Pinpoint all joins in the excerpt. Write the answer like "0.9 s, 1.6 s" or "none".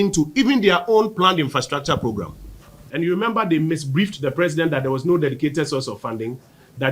2.9 s